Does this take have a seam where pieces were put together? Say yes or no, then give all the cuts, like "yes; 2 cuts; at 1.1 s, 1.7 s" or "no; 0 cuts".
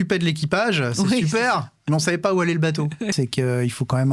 yes; 1 cut; at 3.1 s